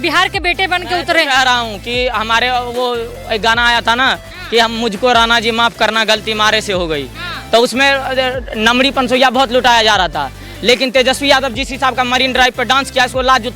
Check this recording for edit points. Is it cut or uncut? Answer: uncut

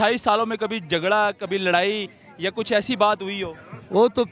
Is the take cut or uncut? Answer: uncut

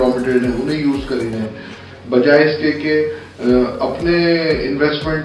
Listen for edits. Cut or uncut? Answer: cut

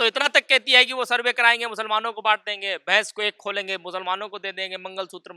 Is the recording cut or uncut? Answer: uncut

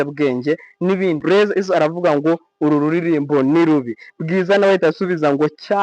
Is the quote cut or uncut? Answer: cut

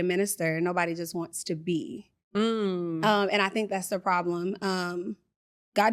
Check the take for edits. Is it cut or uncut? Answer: uncut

